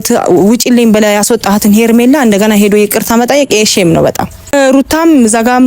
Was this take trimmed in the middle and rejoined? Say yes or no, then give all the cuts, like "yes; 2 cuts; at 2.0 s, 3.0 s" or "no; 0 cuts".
yes; 1 cut; at 4.5 s